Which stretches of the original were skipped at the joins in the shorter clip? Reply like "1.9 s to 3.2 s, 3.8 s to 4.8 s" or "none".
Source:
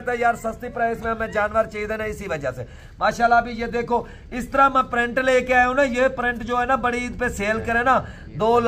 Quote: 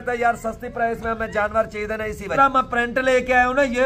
2.3 s to 4.5 s